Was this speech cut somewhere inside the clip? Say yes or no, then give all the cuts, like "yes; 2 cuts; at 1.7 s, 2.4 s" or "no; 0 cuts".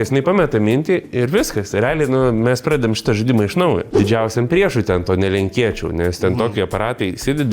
yes; 1 cut; at 3.9 s